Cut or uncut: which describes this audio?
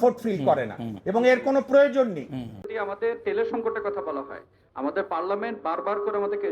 cut